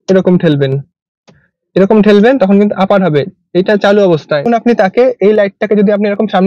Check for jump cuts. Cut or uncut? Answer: cut